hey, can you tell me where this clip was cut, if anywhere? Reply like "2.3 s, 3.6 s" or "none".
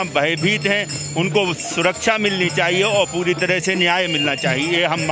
none